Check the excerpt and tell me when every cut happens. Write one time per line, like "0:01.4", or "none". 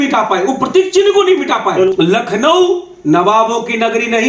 0:01.9